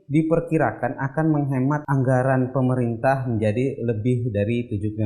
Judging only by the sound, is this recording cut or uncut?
cut